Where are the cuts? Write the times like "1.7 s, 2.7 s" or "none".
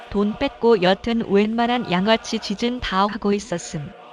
none